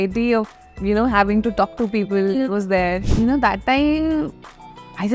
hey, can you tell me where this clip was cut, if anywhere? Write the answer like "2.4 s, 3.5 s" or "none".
3.0 s